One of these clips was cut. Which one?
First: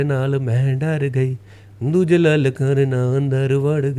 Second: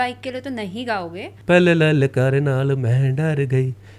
second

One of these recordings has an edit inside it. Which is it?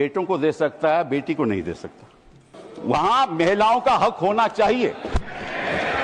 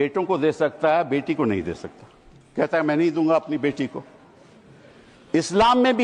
first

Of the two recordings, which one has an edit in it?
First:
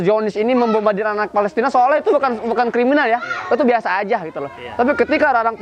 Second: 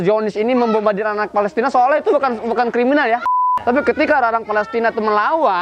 second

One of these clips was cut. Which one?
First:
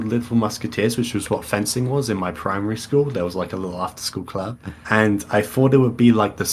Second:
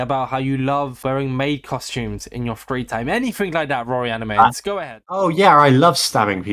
second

